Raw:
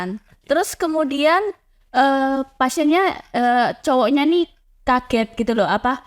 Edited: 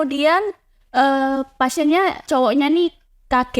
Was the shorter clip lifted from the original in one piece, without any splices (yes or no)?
no